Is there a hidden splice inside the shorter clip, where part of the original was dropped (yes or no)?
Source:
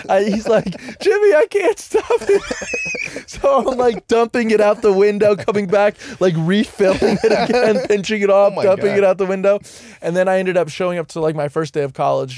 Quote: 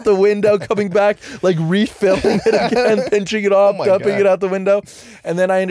no